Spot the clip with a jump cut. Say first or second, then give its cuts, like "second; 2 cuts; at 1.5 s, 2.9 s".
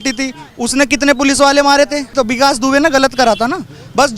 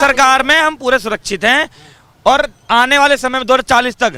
first; 1 cut; at 2.1 s